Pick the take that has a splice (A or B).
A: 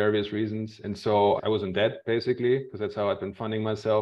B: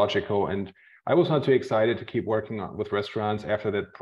A